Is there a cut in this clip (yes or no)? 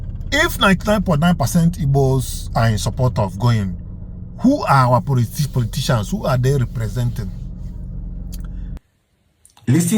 yes